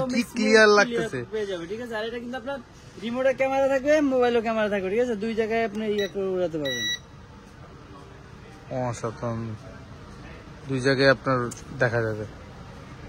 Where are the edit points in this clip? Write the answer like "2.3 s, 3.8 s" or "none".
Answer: none